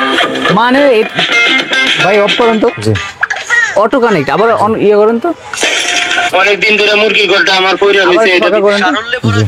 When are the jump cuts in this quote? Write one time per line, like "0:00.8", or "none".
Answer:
none